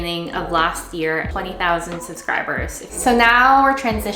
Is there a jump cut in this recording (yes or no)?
yes